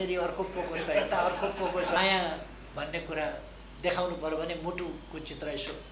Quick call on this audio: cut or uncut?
cut